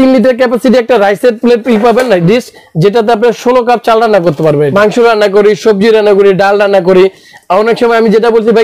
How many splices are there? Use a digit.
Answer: 1